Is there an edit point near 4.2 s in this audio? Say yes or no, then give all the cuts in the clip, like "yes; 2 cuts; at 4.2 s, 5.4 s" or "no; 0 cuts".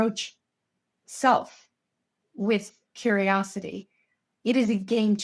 yes; 1 cut; at 4.2 s